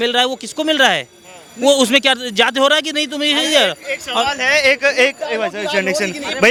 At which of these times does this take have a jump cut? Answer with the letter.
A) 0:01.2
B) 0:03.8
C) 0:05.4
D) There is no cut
D